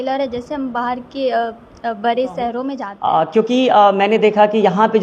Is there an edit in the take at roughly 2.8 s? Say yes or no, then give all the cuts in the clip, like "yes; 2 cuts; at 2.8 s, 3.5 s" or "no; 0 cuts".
yes; 1 cut; at 2.8 s